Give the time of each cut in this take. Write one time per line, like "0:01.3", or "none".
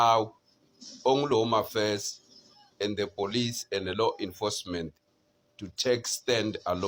none